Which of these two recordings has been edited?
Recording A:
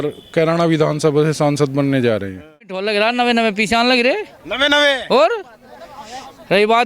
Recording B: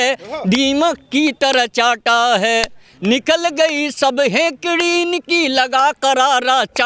A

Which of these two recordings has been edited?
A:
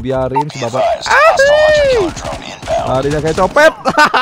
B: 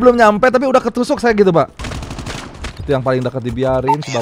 B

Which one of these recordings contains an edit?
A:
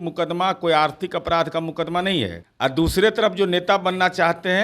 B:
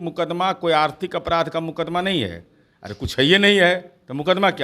A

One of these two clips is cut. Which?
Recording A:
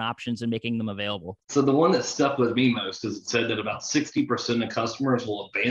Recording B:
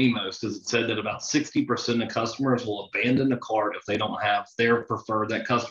A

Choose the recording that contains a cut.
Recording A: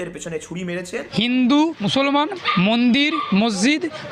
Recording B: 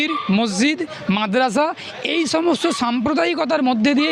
A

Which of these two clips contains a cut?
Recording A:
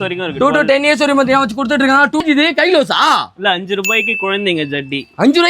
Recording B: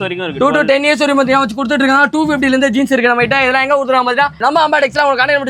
A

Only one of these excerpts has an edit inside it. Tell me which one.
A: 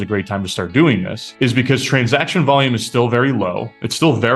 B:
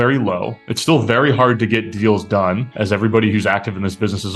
A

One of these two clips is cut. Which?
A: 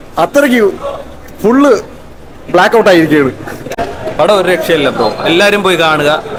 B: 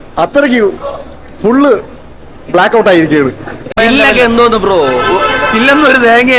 B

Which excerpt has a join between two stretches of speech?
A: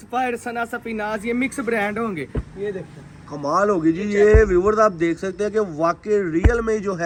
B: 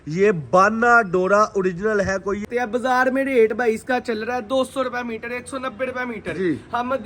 B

